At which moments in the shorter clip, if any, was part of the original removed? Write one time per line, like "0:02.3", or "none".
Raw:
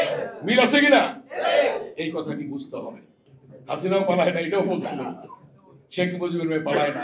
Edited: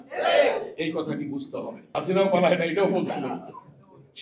0:01.8